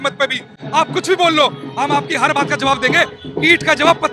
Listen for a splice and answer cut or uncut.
uncut